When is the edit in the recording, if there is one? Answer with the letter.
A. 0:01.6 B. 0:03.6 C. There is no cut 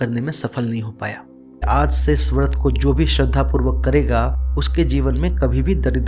A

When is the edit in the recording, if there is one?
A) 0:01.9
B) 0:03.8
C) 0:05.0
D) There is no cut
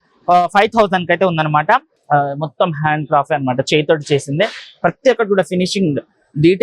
A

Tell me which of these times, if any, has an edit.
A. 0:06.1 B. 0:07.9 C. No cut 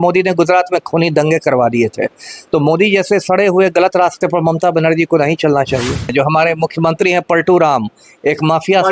A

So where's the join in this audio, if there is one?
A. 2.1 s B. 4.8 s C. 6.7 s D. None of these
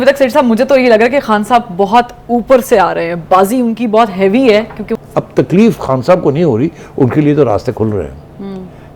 B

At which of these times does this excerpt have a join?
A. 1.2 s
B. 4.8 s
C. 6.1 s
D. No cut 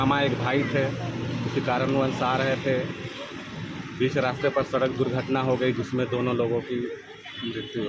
D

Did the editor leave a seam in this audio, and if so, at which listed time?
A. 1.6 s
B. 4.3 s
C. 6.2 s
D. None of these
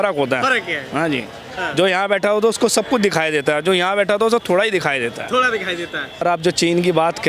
C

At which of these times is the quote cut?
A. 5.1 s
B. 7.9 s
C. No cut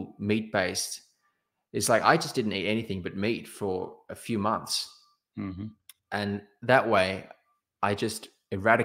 C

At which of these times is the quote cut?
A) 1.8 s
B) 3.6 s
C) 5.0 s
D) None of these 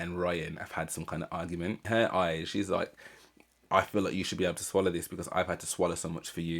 A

